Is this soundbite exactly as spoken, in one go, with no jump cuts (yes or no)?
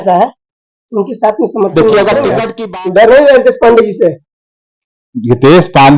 no